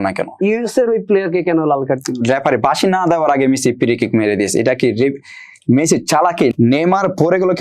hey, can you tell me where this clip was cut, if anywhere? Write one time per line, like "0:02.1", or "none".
0:02.2
0:06.5